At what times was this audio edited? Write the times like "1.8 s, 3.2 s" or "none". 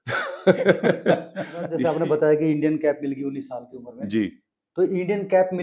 1.8 s